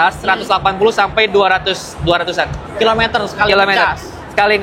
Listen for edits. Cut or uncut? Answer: uncut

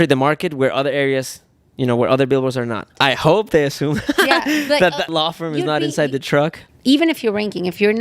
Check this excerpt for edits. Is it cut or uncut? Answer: cut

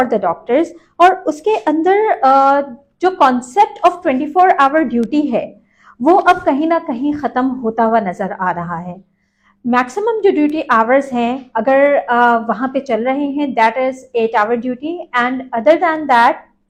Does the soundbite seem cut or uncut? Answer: uncut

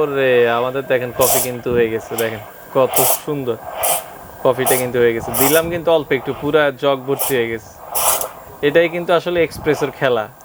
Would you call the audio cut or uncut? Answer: uncut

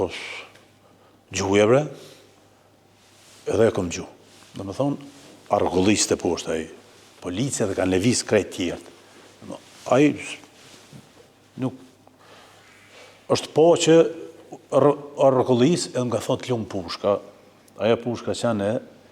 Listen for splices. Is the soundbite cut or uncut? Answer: uncut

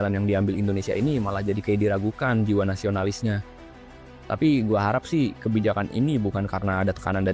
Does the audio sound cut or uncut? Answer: uncut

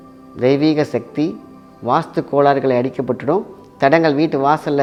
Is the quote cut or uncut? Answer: uncut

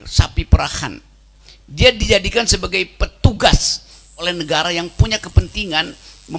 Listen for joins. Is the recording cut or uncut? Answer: cut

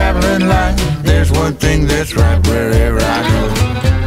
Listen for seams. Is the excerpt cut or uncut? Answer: uncut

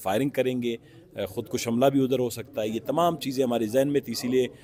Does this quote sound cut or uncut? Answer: uncut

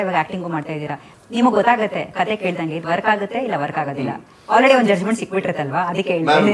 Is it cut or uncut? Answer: cut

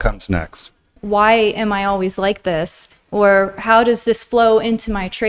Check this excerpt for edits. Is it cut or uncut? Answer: cut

